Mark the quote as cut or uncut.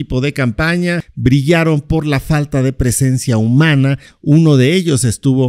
cut